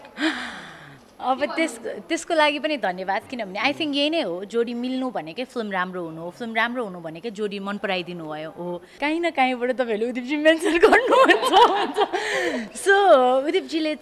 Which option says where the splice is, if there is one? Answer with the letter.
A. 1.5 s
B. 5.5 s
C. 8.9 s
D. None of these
C